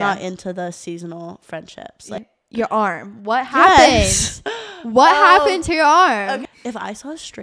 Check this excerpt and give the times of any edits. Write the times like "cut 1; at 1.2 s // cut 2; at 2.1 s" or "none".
cut 1; at 2.2 s // cut 2; at 6.4 s